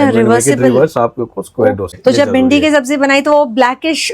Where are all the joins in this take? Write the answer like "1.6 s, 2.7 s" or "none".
1.8 s